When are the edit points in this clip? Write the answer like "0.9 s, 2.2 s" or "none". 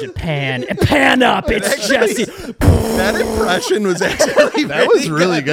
none